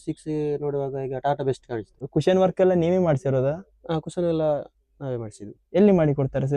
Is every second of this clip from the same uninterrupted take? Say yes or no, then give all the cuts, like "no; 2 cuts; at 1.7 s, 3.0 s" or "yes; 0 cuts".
no; 1 cut; at 2.0 s